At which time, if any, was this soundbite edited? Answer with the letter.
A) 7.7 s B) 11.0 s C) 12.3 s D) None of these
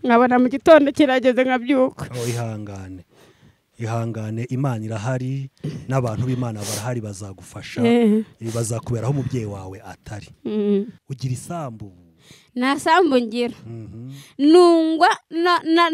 B